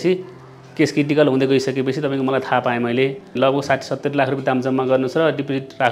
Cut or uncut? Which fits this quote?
cut